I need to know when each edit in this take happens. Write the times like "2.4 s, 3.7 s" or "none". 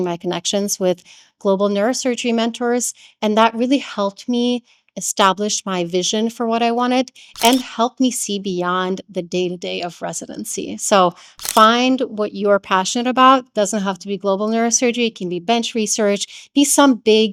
none